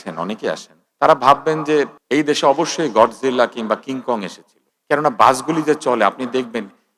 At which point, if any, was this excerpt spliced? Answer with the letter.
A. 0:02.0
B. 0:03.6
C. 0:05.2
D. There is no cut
D